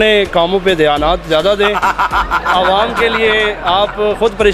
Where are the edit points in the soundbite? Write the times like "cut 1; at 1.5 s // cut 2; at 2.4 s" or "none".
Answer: none